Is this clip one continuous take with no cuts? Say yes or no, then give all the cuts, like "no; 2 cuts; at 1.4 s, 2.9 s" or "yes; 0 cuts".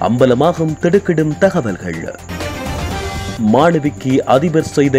no; 2 cuts; at 2.2 s, 3.4 s